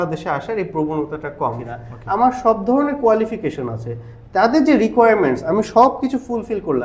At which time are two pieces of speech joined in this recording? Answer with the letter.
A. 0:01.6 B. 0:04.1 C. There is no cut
A